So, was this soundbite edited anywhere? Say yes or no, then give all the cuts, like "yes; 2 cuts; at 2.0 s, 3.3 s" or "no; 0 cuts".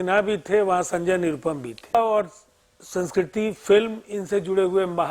yes; 1 cut; at 1.9 s